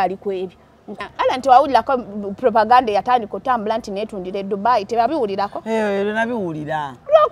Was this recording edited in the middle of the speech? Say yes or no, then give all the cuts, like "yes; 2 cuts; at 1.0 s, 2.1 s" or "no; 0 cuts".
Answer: yes; 1 cut; at 1.0 s